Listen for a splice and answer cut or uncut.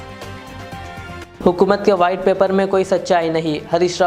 uncut